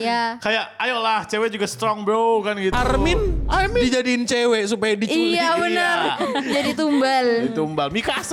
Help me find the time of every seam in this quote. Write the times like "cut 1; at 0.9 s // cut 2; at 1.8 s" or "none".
none